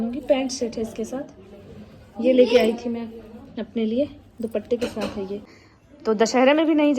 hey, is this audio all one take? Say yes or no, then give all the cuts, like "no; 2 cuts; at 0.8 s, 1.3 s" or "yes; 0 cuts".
no; 1 cut; at 5.6 s